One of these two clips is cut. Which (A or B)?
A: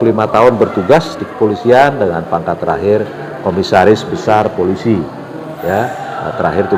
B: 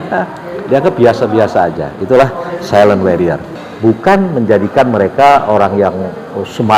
B